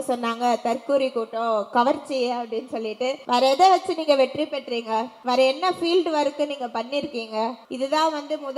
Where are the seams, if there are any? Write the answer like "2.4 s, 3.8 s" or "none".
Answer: 3.2 s, 5.1 s, 7.6 s